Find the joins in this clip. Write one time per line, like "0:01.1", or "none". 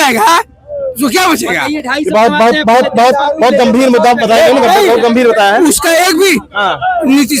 none